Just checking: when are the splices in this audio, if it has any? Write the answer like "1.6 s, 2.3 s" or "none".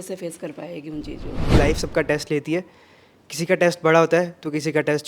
1.5 s